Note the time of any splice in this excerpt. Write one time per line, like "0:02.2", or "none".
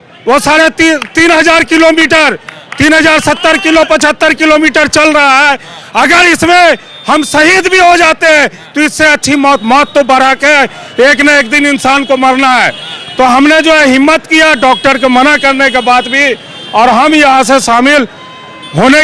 none